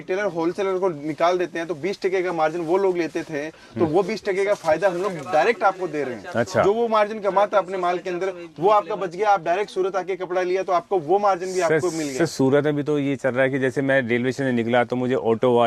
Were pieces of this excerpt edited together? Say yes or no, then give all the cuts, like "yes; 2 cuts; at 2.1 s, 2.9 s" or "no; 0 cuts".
no; 0 cuts